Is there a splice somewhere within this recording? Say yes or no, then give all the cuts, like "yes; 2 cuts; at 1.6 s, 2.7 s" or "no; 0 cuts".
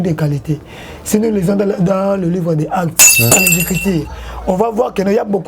yes; 1 cut; at 3.3 s